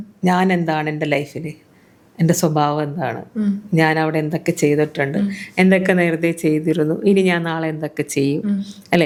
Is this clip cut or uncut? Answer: uncut